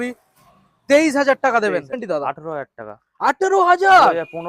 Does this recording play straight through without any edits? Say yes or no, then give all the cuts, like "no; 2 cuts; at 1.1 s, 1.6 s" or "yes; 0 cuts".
no; 1 cut; at 2.0 s